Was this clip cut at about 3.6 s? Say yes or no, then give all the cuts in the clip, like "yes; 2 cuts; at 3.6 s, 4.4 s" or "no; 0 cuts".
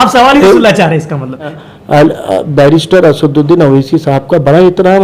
no; 1 cut; at 1.6 s